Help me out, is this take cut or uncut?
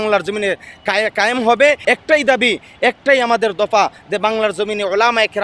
cut